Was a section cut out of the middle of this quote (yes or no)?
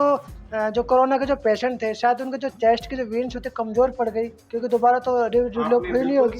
no